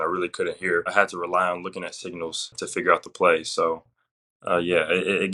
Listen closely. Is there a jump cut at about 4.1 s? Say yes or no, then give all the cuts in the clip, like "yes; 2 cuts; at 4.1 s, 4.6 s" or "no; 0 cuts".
no; 2 cuts; at 0.9 s, 2.6 s